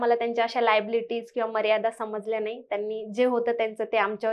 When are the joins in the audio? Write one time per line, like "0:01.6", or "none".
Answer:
none